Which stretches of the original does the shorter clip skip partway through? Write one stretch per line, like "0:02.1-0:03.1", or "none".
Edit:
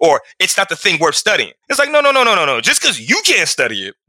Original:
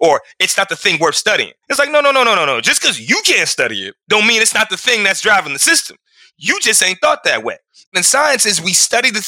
none

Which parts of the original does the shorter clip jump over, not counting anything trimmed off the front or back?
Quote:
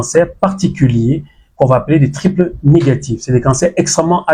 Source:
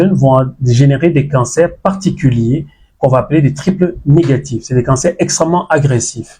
none

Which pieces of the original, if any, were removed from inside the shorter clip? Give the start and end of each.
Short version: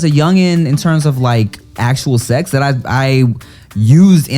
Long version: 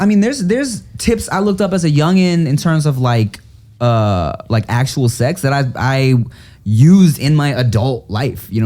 0:03.6-0:04.7

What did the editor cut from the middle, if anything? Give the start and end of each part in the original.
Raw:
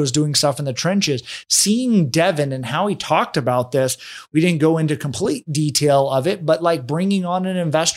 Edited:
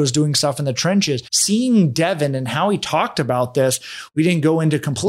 0:01.3-0:01.5

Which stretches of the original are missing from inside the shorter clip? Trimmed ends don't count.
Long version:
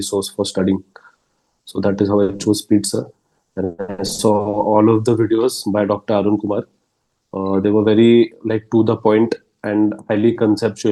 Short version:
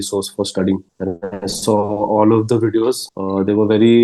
0:00.9-0:03.5
0:05.6-0:07.2

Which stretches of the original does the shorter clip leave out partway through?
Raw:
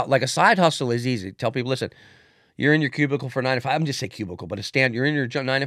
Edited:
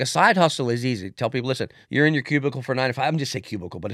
0:02.0-0:02.4

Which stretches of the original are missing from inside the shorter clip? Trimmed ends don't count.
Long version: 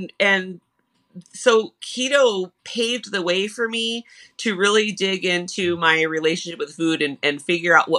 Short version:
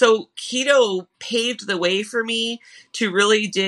none

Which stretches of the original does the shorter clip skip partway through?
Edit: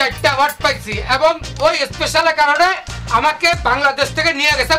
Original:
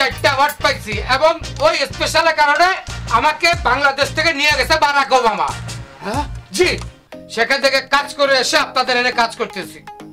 none

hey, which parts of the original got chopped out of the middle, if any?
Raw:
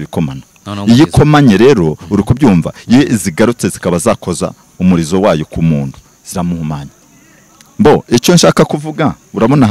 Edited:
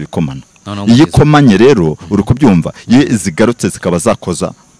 none

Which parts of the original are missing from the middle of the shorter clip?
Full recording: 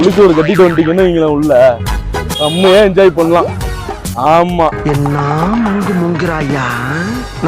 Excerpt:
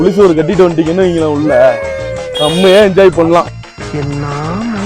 0:03.9-0:04.8

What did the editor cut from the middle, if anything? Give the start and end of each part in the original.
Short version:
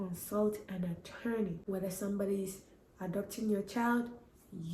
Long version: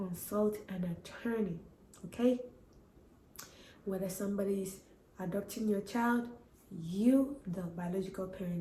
0:01.6-0:03.8

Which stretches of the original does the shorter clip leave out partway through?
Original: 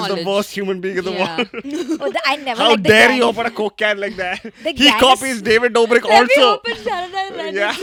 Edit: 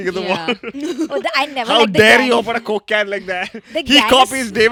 none

